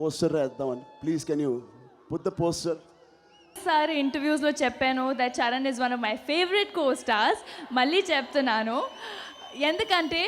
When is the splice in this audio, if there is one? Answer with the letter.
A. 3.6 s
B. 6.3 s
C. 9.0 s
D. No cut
A